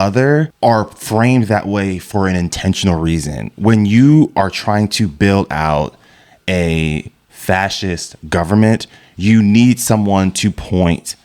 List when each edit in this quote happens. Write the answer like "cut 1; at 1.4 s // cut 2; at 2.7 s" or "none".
none